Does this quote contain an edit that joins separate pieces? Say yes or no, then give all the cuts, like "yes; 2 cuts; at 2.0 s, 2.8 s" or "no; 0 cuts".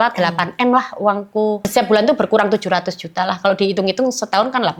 yes; 1 cut; at 1.7 s